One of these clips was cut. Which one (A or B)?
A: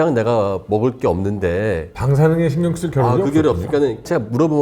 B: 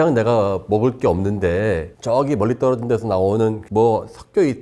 A